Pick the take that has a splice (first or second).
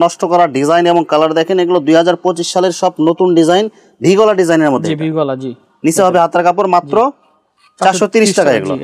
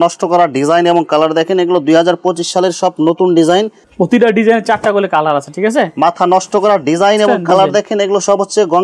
second